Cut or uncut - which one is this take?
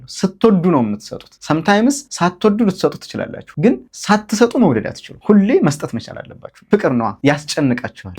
cut